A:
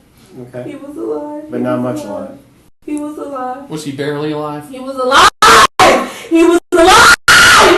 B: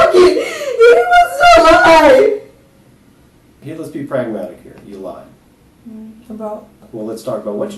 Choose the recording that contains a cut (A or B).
B